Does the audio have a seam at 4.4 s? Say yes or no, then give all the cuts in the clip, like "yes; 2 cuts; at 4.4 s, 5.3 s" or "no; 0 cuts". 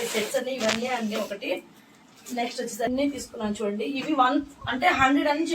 no; 1 cut; at 2.9 s